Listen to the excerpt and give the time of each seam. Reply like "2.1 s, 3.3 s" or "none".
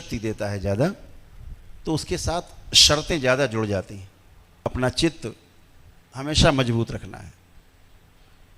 4.7 s